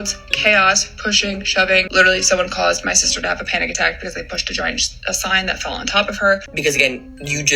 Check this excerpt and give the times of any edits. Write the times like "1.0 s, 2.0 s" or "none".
1.9 s, 6.5 s